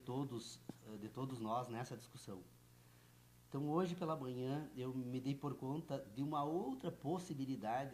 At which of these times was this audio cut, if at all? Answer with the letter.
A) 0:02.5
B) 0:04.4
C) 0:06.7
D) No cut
C